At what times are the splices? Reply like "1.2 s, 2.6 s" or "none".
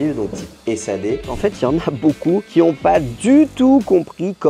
1.3 s, 2.5 s

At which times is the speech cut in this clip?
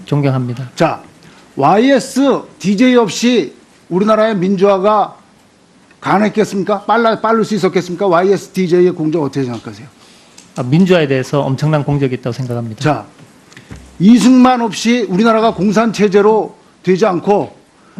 none

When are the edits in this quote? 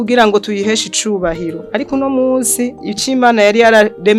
none

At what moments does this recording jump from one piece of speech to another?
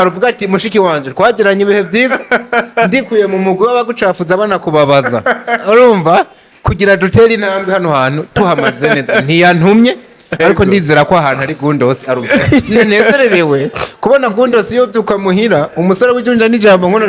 none

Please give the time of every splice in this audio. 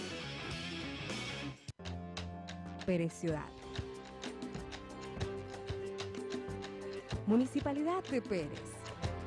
1.7 s

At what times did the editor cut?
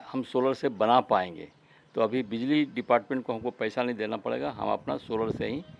none

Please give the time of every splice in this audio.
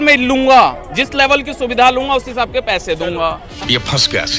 3.5 s

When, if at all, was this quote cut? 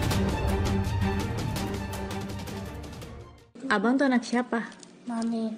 none

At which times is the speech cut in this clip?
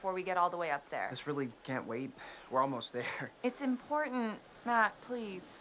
none

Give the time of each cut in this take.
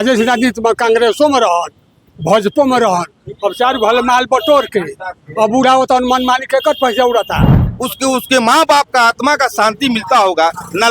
7.7 s

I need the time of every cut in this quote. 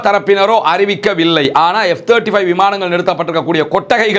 none

